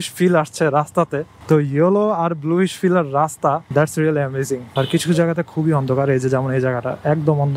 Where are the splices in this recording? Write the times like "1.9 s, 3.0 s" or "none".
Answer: 4.7 s